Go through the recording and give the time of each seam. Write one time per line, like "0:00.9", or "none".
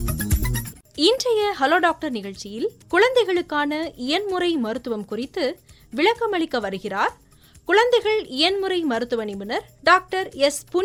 none